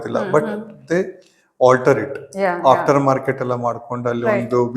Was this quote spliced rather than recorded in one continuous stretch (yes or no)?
no